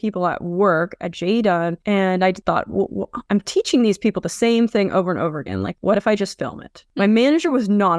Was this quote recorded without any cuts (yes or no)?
yes